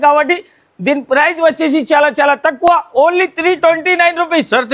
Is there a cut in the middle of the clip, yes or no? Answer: no